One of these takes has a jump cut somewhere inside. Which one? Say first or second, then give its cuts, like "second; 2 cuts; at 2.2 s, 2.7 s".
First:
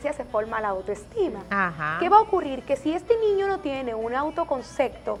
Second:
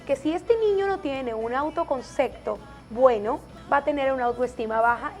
second; 1 cut; at 3.5 s